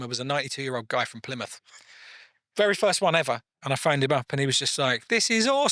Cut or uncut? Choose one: cut